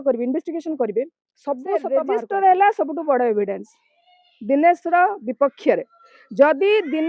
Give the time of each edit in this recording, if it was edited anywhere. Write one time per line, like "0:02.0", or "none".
0:01.8